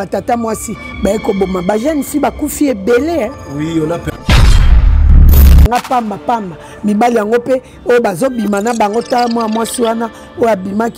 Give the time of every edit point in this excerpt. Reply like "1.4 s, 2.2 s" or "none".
5.7 s